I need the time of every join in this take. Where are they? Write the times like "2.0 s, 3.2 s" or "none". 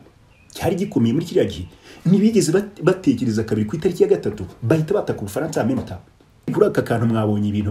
6.5 s